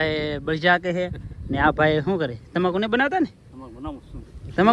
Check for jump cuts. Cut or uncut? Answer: uncut